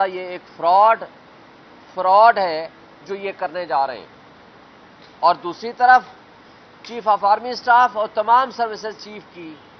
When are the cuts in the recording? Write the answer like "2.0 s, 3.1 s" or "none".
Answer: 8.4 s